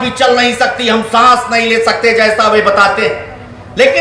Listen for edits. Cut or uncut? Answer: uncut